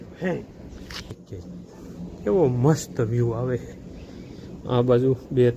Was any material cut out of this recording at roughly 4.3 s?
no; 1 cut; at 1.3 s

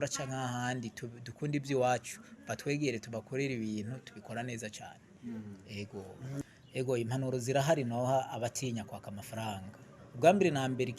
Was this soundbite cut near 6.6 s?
yes; 1 cut; at 6.6 s

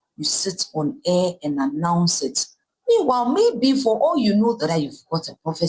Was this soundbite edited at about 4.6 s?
yes; 1 cut; at 4.6 s

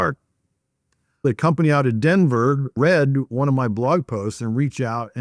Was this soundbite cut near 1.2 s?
yes; 1 cut; at 1.2 s

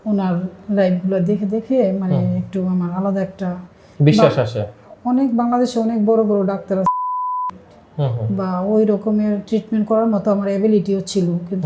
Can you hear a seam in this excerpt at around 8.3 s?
no; 0 cuts

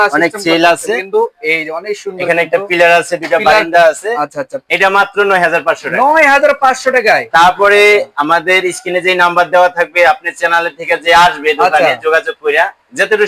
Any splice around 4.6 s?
yes; 1 cut; at 4.6 s

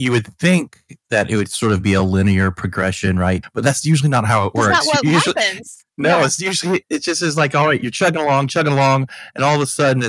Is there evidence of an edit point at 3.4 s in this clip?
yes; 2 cuts; at 3.4 s, 6.8 s

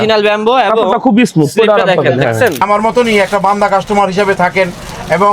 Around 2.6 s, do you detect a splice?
yes; 1 cut; at 2.6 s

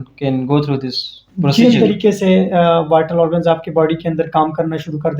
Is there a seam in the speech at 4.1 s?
no; 1 cut; at 1.8 s

